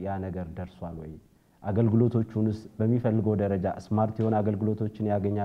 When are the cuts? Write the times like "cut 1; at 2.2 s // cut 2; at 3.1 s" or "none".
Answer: none